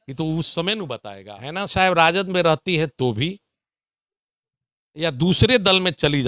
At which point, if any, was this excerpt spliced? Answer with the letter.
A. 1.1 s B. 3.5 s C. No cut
A